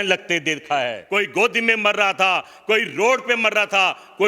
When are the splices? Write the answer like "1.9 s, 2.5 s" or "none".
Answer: 1.0 s